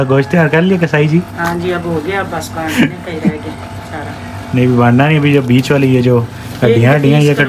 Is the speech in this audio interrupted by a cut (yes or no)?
no